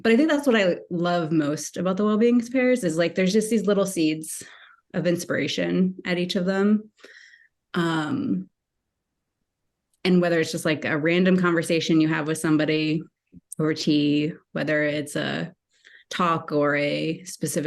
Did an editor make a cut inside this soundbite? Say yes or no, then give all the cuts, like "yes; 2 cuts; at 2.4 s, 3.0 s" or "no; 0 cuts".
no; 0 cuts